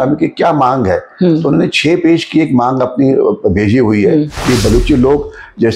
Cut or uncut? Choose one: cut